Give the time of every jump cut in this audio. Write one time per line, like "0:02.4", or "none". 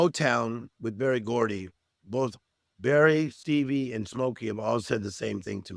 0:03.4